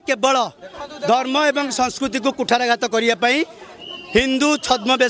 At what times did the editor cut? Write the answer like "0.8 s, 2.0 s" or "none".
none